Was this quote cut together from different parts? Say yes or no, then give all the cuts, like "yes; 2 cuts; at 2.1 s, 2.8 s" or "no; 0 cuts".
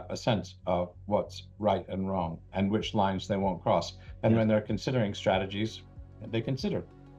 no; 0 cuts